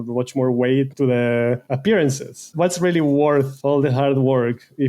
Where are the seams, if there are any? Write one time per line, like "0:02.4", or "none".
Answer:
0:00.9
0:01.7
0:02.5
0:03.5